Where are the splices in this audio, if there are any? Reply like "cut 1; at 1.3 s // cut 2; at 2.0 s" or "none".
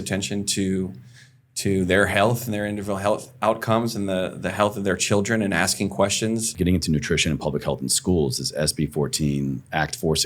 cut 1; at 6.5 s